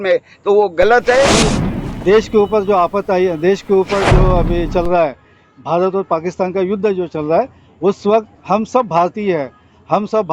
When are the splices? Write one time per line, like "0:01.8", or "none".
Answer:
0:01.4